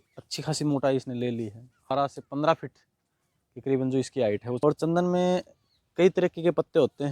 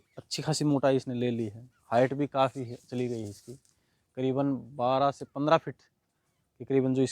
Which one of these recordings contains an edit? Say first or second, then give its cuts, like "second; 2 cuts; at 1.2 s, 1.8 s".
first; 2 cuts; at 1.9 s, 4.6 s